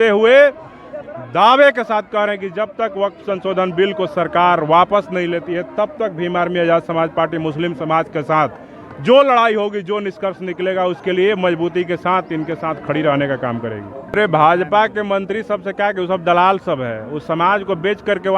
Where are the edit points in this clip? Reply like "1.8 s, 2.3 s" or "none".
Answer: 14.2 s